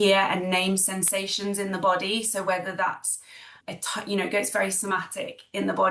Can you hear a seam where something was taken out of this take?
no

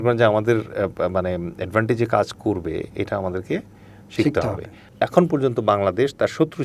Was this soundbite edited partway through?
yes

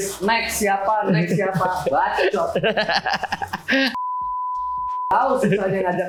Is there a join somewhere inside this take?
no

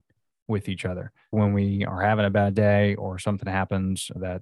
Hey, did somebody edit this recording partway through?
yes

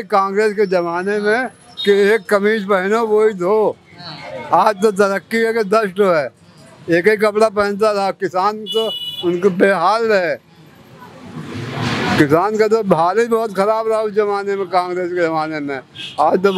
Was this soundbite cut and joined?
no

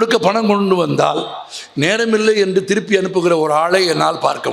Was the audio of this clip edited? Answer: no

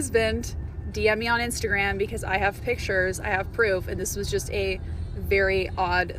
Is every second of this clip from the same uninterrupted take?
yes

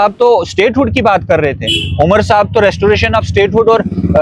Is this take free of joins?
yes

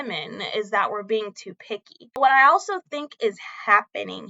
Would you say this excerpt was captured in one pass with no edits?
no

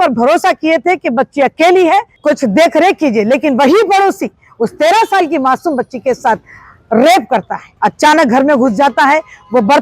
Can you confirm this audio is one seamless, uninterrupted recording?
no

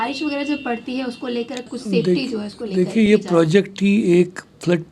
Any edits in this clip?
yes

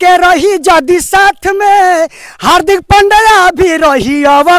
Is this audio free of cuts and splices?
yes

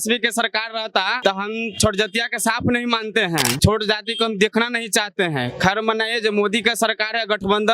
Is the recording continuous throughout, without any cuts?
no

